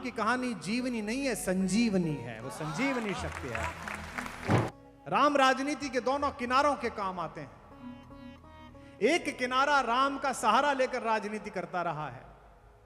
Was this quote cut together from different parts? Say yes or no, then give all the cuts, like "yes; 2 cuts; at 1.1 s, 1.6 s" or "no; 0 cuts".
yes; 1 cut; at 4.7 s